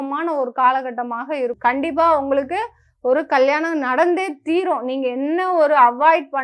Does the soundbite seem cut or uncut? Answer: cut